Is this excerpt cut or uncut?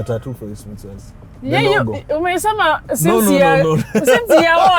uncut